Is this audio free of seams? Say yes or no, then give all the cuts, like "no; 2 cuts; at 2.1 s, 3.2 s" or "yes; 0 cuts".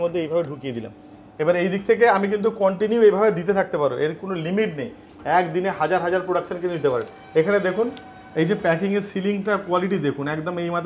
yes; 0 cuts